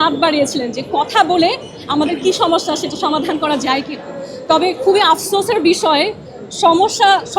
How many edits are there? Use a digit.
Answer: 0